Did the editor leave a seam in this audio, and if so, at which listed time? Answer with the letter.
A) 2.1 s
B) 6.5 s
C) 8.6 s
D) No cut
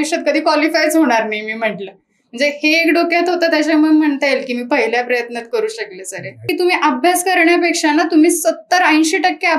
B